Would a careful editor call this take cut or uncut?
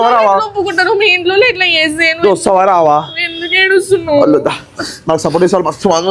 uncut